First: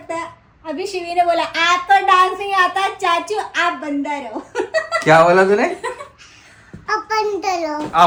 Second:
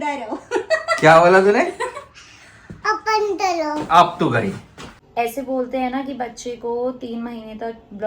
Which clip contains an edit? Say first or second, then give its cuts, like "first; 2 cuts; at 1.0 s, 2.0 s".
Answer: second; 1 cut; at 5.0 s